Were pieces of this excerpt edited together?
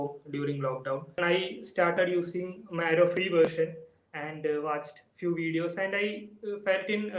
yes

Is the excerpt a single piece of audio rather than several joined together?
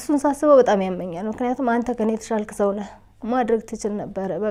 yes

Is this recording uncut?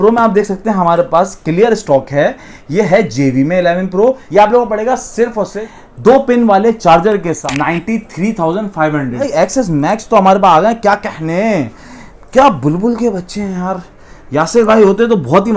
no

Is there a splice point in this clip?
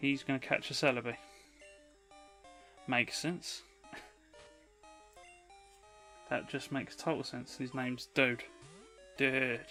no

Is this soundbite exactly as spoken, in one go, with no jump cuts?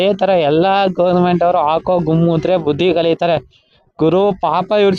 yes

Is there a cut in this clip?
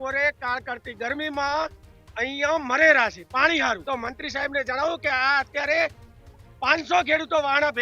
yes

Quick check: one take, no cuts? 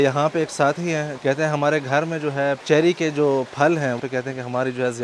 no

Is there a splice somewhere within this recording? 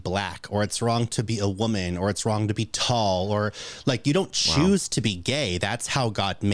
no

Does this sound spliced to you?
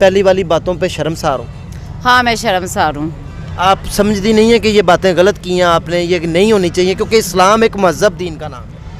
no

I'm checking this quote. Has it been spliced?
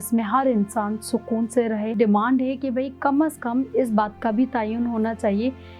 yes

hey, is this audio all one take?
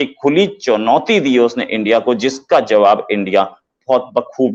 yes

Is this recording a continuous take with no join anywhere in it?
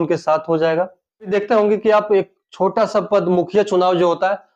no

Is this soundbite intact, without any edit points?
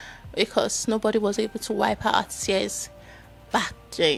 yes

